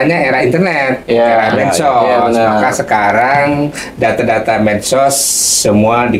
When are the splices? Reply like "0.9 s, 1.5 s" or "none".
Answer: none